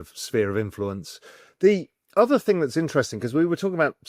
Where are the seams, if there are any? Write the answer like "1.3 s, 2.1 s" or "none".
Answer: none